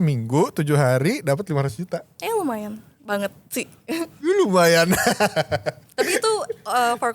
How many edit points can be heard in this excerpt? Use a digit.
0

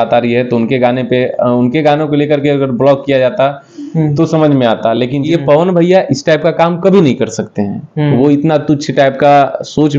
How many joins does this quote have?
1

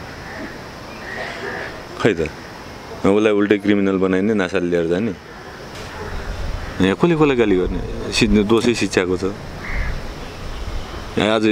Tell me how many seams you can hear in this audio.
1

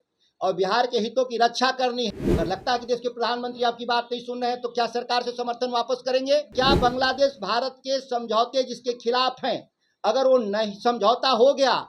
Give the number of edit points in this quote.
2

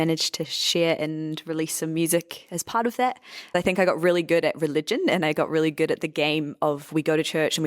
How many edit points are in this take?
1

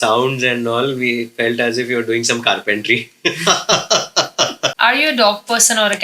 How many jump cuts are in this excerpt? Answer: 1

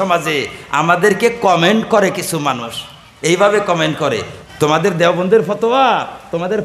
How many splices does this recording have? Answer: 1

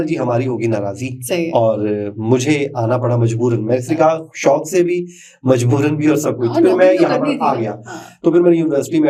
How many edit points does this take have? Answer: 0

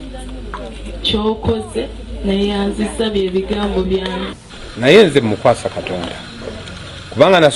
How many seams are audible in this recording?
1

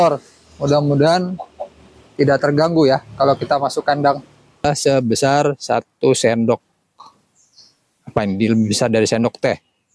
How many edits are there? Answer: 1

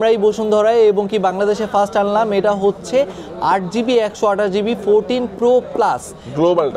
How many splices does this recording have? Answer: 0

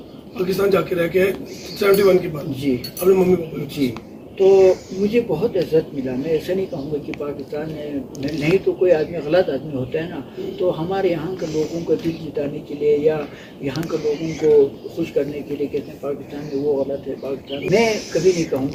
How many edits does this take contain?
0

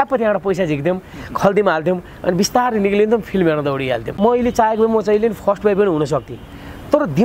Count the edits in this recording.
1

